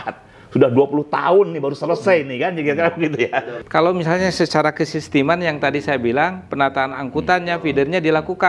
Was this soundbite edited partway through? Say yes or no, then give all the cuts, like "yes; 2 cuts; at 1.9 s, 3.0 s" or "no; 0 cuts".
yes; 1 cut; at 3.6 s